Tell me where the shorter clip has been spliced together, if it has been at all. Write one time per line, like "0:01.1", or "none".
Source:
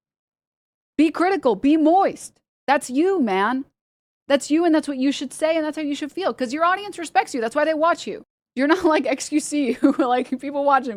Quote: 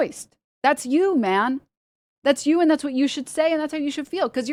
none